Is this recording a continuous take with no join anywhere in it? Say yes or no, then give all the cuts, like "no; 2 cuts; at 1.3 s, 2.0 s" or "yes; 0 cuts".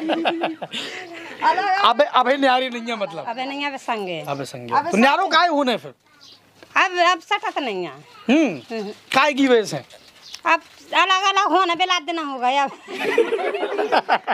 yes; 0 cuts